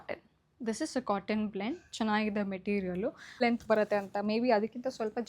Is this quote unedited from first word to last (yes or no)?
no